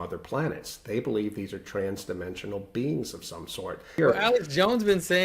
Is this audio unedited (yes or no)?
no